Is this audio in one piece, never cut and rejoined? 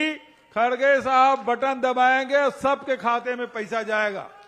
yes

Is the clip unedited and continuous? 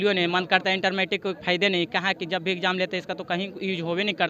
yes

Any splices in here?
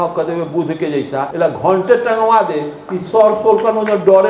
yes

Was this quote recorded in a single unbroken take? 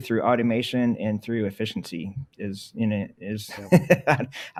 yes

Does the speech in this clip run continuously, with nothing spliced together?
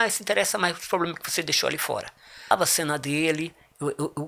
no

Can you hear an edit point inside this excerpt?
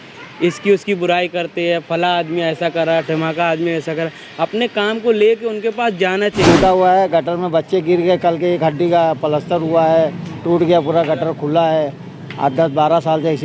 yes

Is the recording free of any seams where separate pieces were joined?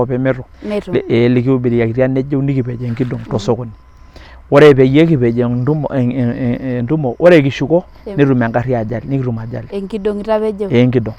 yes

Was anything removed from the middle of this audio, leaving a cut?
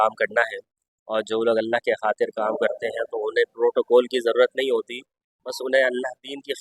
no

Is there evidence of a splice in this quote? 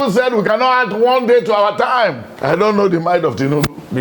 yes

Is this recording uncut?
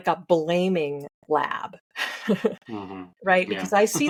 yes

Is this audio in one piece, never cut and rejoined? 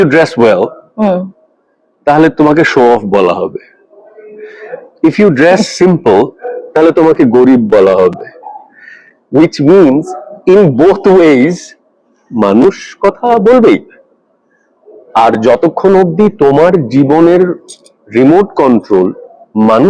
yes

